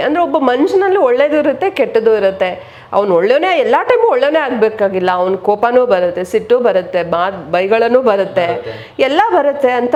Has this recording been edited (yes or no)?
no